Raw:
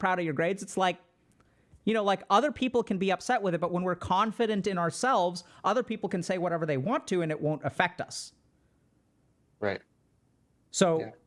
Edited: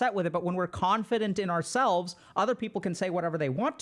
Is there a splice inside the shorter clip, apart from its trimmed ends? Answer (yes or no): no